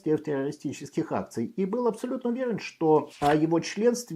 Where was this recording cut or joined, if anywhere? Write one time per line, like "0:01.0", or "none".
0:03.1